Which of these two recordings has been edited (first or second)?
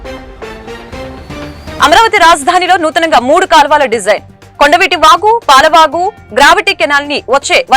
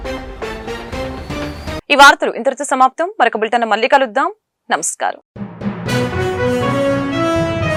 first